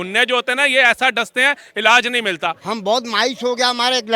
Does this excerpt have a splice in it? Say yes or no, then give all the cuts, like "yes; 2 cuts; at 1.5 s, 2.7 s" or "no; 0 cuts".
yes; 1 cut; at 2.6 s